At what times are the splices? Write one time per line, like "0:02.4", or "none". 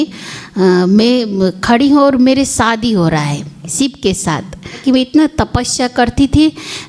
0:03.7
0:04.8